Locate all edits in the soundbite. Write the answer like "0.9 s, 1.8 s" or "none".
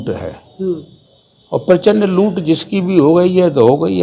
none